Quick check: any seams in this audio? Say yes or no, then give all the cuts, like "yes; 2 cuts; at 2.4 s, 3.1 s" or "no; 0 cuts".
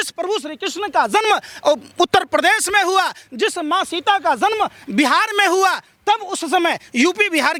no; 0 cuts